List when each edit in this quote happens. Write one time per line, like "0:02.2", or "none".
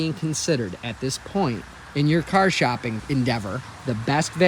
0:01.7
0:03.3